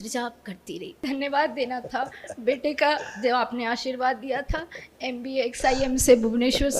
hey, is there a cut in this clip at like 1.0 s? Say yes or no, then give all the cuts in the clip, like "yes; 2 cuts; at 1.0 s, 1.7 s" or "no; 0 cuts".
yes; 1 cut; at 1.0 s